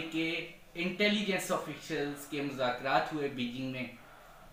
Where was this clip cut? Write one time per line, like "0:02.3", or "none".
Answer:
none